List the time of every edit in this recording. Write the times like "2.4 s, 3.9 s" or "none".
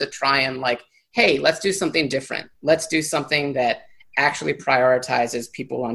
none

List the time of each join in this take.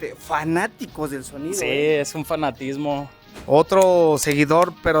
3.3 s

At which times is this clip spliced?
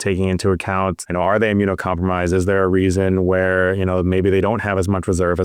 1.0 s

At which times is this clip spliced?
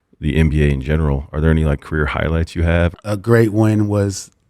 3.0 s

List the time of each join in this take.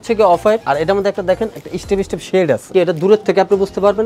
2.7 s

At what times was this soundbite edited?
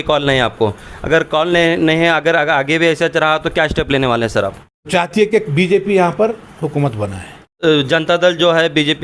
4.8 s, 7.6 s

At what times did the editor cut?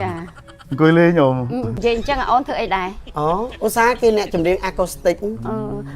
1.7 s

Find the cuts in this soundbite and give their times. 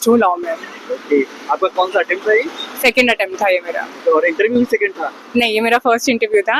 none

